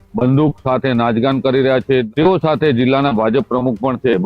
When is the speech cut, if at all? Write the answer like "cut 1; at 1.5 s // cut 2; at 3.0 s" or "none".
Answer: cut 1; at 2.1 s